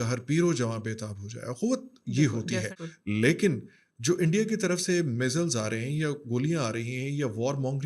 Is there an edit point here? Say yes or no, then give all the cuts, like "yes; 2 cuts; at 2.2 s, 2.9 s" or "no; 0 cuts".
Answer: yes; 1 cut; at 2.8 s